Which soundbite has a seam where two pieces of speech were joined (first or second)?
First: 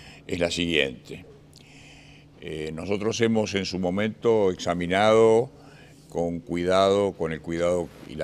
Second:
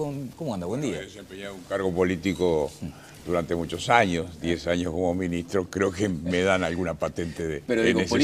first